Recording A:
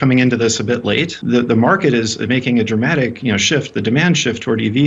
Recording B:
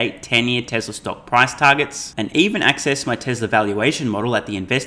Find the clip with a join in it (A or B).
A